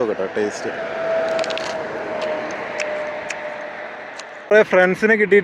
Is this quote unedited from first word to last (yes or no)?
no